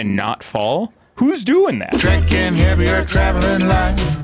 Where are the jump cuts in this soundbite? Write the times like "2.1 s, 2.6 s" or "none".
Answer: 1.9 s